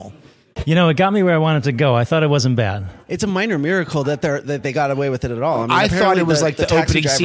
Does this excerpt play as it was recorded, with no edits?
yes; 0 cuts

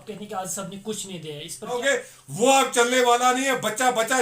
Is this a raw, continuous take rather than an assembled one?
no; 1 cut; at 1.8 s

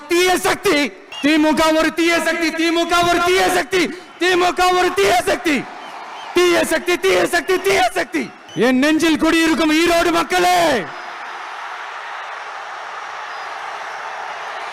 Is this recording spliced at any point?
yes; 2 cuts; at 1.0 s, 8.4 s

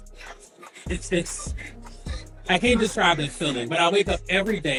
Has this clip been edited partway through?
no; 0 cuts

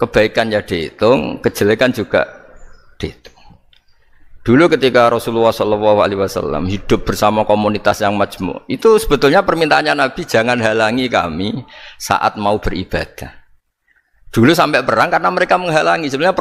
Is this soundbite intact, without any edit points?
yes; 0 cuts

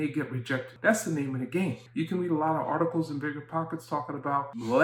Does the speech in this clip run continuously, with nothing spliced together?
yes; 0 cuts

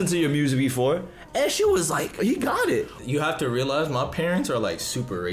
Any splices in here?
yes; 2 cuts; at 2.2 s, 3.0 s

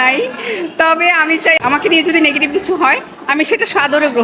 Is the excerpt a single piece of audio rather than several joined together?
no; 1 cut; at 1.6 s

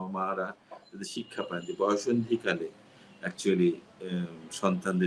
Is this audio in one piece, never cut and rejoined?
yes; 0 cuts

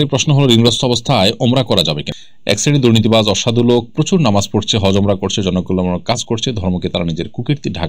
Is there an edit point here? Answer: yes; 1 cut; at 2.0 s

